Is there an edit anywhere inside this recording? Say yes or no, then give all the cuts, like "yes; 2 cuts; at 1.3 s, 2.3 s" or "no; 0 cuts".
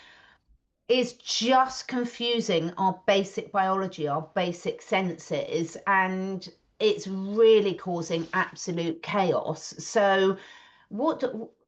no; 0 cuts